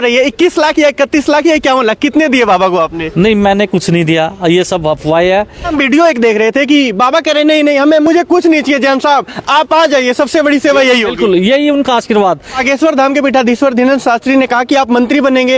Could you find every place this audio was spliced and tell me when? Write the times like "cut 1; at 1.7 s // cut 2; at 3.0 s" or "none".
cut 1; at 5.7 s // cut 2; at 12.6 s

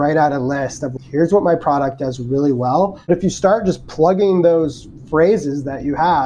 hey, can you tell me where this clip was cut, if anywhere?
cut 1; at 0.9 s // cut 2; at 3.1 s

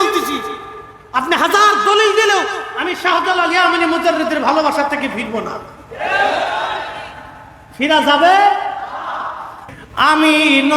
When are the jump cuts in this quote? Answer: cut 1; at 9.5 s

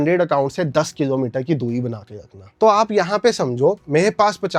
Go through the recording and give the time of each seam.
none

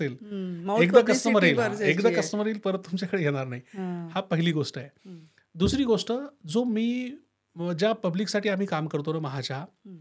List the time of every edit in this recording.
none

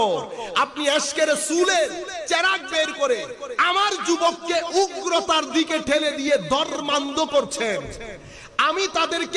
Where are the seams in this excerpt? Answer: none

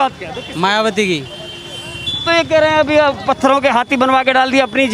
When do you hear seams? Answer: none

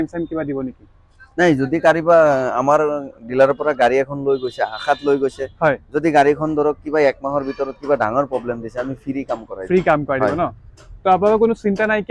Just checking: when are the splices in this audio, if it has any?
none

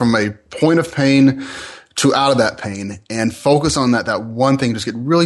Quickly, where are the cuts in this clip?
none

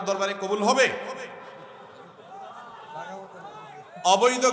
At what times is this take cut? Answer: none

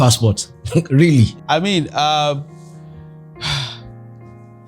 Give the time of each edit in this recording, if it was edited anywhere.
cut 1; at 1.4 s

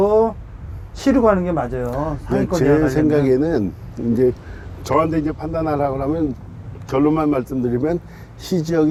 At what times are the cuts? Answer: none

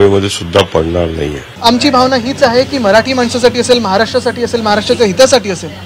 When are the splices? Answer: cut 1; at 1.6 s

